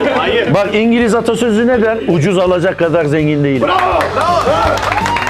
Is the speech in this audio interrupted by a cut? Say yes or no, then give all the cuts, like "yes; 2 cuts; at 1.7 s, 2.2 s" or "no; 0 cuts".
no; 0 cuts